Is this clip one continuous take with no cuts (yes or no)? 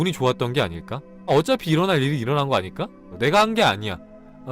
no